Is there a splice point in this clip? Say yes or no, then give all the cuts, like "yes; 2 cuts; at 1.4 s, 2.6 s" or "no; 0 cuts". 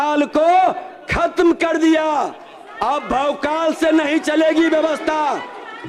no; 0 cuts